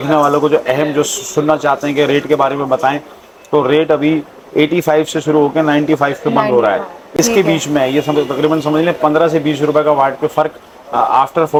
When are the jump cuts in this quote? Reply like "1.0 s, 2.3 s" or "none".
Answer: none